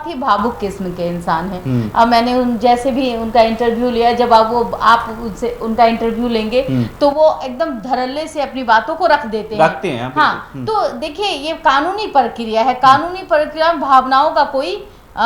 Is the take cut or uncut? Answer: uncut